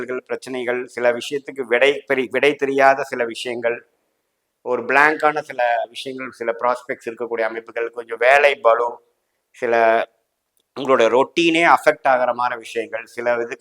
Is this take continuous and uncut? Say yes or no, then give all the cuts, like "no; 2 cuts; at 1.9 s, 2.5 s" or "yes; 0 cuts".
yes; 0 cuts